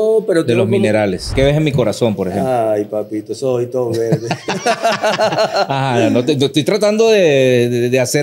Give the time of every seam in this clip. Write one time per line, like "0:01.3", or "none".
0:01.3